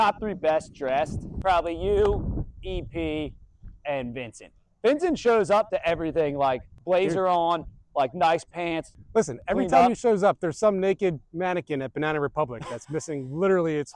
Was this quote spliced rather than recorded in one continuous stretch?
yes; 3 cuts; at 1.3 s, 6.7 s, 8.9 s

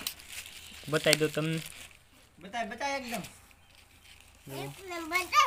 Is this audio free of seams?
yes; 0 cuts

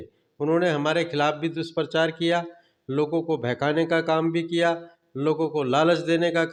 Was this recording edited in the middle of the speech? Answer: no; 0 cuts

